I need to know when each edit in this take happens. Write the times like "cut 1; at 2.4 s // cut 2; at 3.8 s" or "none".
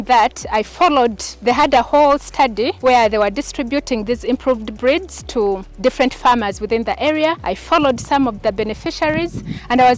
cut 1; at 1.3 s // cut 2; at 2.7 s // cut 3; at 5.7 s // cut 4; at 7.5 s